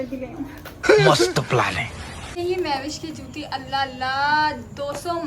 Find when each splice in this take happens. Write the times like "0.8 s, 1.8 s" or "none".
none